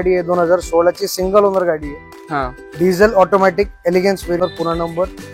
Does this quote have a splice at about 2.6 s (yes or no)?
no